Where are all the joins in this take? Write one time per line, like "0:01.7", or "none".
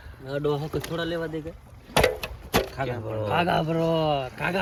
none